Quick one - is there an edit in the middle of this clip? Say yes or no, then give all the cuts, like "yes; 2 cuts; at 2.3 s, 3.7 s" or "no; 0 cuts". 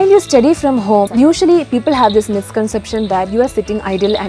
yes; 1 cut; at 1.1 s